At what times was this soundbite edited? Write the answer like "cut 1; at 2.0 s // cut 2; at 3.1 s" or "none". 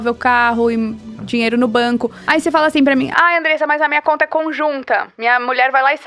cut 1; at 2.2 s